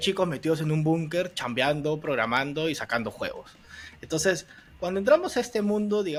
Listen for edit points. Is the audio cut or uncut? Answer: uncut